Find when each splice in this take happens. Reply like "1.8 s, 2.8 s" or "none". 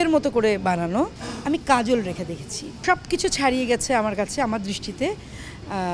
1.3 s, 2.8 s

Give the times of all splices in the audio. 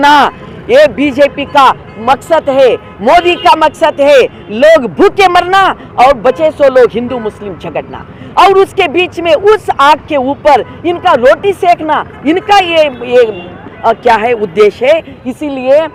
none

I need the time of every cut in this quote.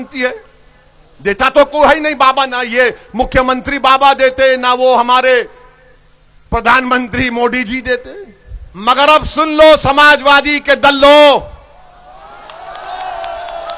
8.7 s

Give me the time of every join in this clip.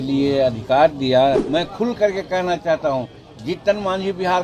1.4 s

